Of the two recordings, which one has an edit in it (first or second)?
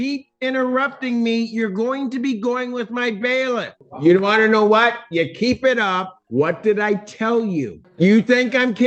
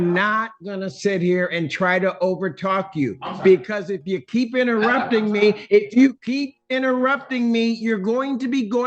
first